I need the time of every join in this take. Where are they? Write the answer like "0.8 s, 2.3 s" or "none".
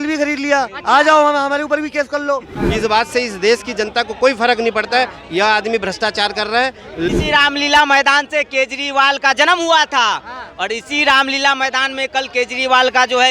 2.6 s, 7.1 s